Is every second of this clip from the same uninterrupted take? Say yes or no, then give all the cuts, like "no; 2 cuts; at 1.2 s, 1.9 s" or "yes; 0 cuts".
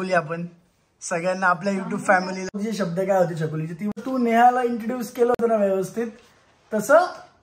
no; 2 cuts; at 2.5 s, 4.0 s